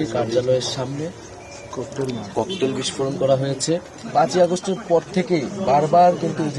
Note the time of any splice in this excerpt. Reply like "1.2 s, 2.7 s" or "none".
4.0 s